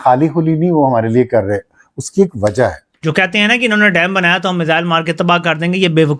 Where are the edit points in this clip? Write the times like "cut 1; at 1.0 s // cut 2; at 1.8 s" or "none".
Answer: cut 1; at 2.9 s